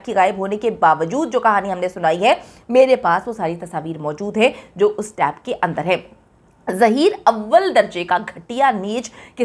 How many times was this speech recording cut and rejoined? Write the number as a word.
zero